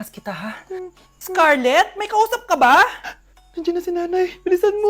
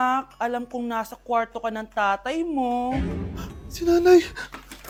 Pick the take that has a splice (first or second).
first